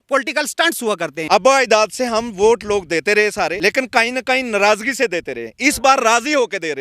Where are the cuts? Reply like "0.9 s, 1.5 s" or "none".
1.2 s, 3.6 s